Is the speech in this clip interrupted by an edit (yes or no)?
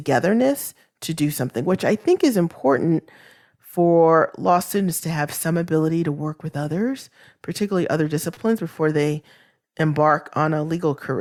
no